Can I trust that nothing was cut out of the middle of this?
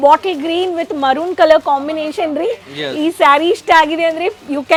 yes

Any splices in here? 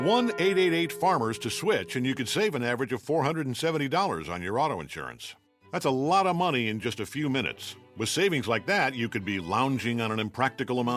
yes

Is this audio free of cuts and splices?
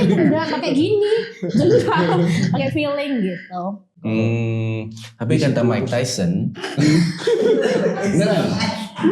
no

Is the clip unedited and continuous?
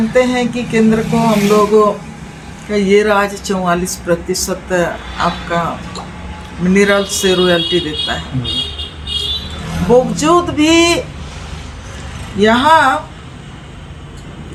yes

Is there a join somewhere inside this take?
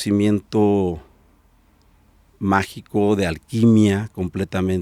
no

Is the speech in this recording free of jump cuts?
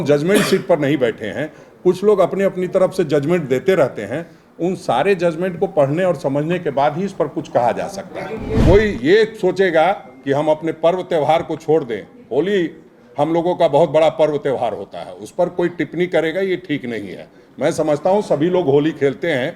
no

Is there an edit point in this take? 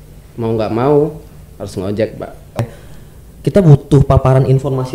yes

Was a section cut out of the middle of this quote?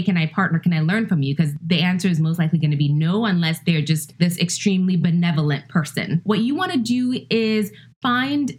yes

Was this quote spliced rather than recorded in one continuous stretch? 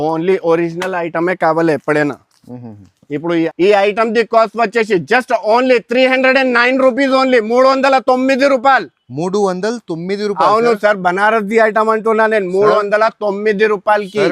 yes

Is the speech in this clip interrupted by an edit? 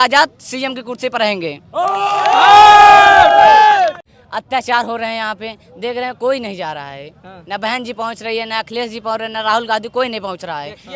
yes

